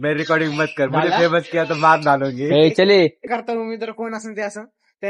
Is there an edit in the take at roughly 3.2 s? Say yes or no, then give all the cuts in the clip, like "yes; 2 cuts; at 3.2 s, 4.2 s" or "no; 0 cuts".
yes; 1 cut; at 3.2 s